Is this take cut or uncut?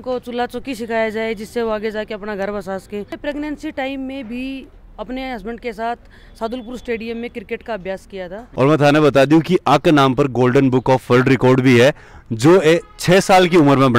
cut